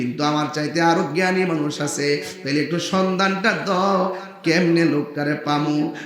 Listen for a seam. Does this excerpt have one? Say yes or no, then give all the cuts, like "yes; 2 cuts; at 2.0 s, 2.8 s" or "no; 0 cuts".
no; 0 cuts